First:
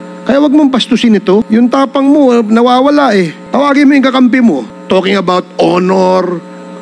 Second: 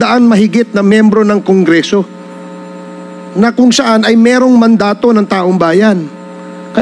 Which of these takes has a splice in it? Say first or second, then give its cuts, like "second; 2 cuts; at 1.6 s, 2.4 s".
first; 3 cuts; at 1.5 s, 3.4 s, 4.7 s